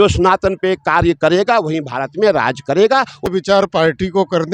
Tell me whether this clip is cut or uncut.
cut